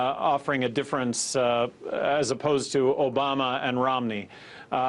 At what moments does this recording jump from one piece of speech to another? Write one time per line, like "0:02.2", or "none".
0:03.1

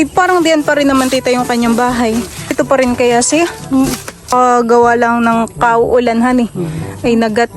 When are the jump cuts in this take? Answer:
0:02.5
0:04.3

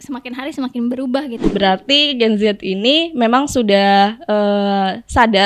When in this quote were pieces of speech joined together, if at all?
0:01.4

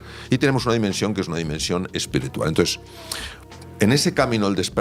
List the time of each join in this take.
none

